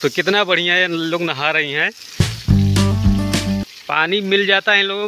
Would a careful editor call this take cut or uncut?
uncut